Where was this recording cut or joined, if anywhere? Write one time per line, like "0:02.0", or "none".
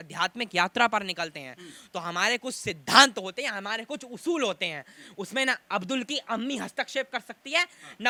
none